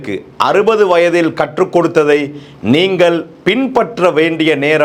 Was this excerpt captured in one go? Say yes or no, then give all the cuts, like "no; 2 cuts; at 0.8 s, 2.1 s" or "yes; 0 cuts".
yes; 0 cuts